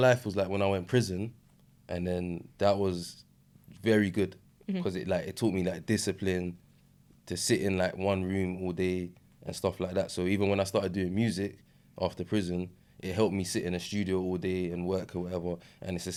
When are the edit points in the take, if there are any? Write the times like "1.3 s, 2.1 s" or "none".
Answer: none